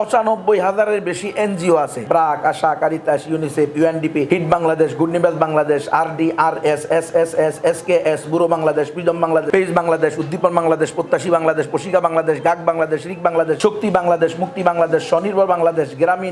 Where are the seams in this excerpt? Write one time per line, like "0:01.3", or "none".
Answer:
0:02.0
0:04.3
0:09.5
0:13.6